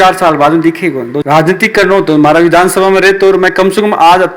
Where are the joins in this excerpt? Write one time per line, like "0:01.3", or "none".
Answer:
0:01.2